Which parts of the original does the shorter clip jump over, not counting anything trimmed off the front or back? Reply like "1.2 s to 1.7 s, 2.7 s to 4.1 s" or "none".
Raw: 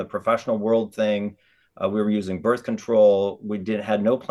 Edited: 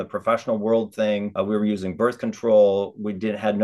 1.3 s to 1.7 s